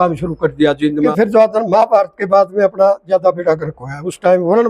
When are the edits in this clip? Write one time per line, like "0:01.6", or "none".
0:01.1

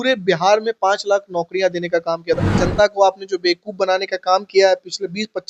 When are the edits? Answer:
0:02.5

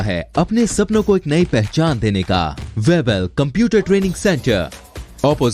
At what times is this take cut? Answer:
0:02.6

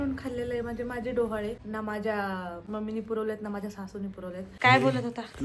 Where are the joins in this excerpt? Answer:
0:01.6
0:02.6
0:04.5

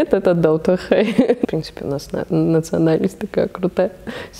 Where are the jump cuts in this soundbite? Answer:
0:01.5

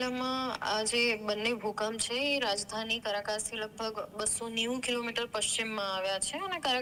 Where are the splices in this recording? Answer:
none

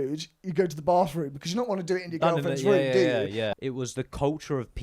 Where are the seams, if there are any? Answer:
0:03.5

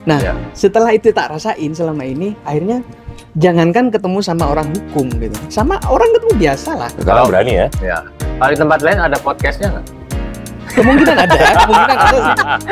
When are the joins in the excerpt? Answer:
0:06.9

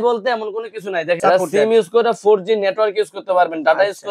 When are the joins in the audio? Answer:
0:01.2

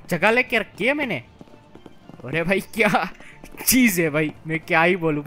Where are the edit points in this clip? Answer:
none

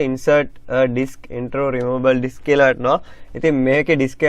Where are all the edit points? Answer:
0:02.6

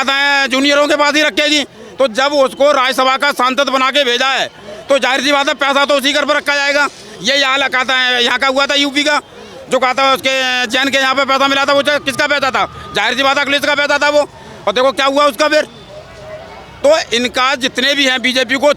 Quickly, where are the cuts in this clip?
none

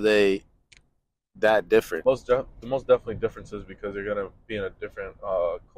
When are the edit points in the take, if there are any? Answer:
0:01.9

